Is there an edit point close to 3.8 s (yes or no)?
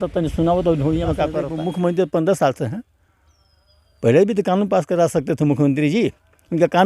no